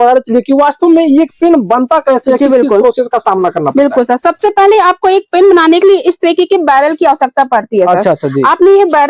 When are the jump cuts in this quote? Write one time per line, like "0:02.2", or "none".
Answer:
none